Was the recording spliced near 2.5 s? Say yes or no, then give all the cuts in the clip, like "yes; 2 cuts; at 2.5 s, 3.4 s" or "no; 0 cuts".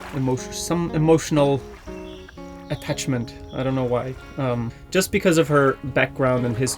no; 1 cut; at 4.7 s